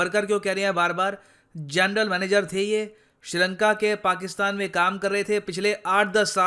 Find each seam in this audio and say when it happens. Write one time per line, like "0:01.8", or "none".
none